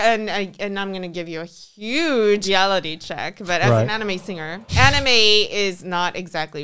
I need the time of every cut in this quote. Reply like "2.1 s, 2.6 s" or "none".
2.4 s, 4.7 s